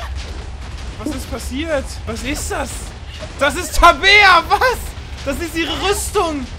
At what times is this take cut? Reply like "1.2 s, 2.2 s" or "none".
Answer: 2.0 s